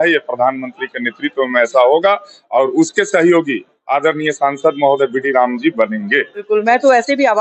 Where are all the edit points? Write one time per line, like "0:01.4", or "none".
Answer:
0:06.5